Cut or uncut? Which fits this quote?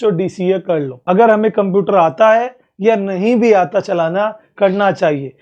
cut